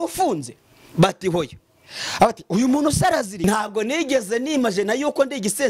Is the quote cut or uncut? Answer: cut